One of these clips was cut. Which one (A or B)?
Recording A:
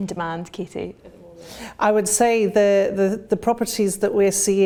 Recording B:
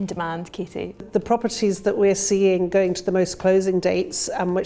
B